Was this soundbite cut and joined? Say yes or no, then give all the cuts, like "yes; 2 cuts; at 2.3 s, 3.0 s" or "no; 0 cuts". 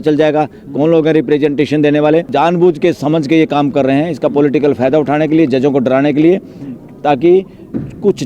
yes; 1 cut; at 2.3 s